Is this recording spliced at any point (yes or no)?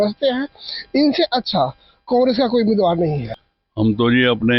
yes